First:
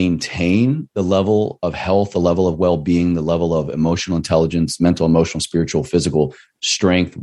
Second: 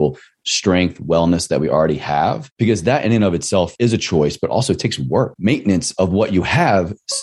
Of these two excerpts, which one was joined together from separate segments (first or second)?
second